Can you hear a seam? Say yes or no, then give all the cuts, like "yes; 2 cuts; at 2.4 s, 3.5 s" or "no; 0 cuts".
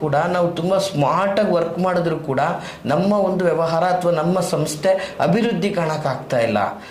no; 0 cuts